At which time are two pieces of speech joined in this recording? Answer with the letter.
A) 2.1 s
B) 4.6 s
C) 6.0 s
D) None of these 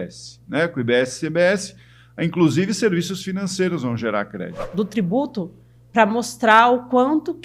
B